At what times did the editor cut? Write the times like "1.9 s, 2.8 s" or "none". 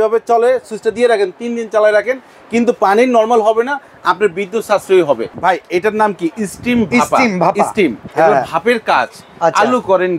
5.4 s

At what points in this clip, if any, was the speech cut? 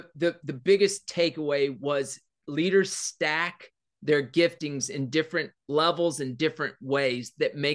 none

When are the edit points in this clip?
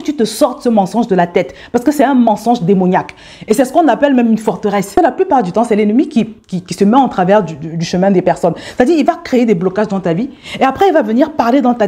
4.9 s

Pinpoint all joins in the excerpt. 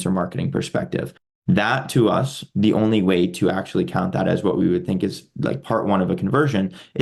none

